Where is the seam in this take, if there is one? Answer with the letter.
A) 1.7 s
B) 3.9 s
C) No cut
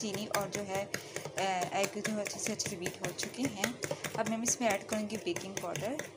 C